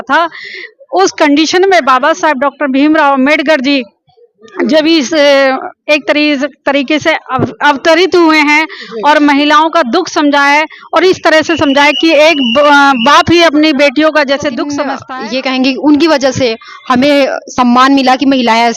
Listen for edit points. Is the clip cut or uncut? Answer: cut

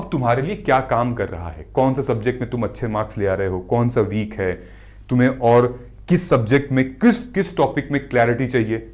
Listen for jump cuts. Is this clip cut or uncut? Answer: uncut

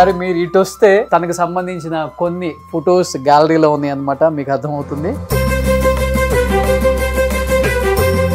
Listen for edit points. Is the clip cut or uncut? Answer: cut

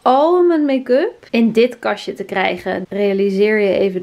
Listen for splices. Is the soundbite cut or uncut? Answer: uncut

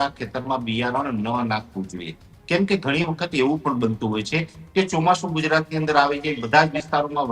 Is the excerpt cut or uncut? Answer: uncut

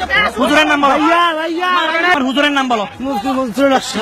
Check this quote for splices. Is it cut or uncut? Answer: cut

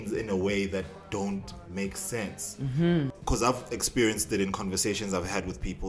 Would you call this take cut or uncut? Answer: cut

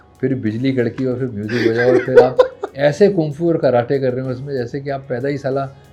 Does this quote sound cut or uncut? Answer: uncut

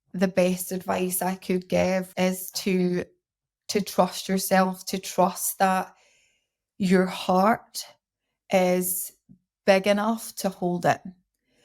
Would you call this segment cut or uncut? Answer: cut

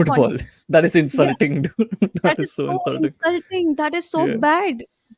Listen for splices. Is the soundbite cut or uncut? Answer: uncut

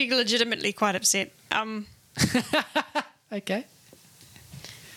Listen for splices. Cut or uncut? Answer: uncut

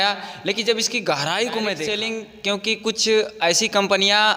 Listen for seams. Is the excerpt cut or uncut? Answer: cut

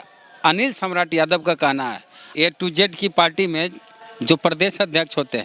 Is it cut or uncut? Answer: cut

